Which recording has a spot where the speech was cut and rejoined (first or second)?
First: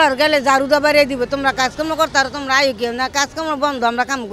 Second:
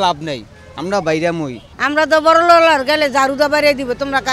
second